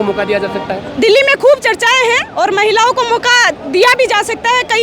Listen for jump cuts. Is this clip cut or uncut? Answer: uncut